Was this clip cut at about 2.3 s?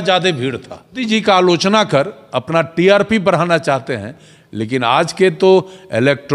no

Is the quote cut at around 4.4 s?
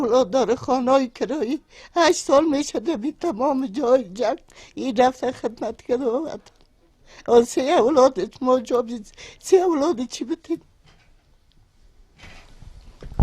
no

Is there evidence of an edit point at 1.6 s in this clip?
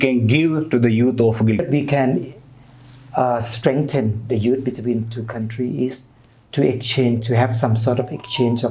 yes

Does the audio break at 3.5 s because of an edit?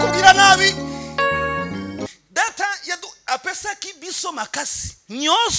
no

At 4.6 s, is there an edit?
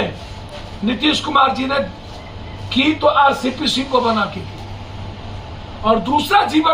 no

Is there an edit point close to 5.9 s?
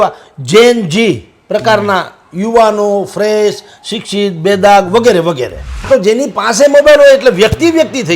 yes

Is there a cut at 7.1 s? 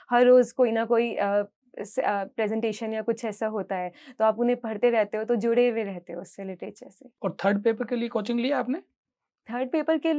no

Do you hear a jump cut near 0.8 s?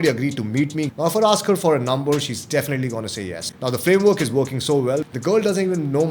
yes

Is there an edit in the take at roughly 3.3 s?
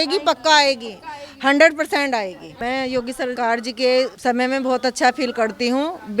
yes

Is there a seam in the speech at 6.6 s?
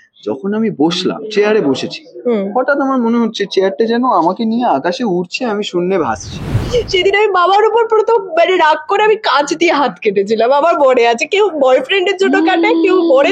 yes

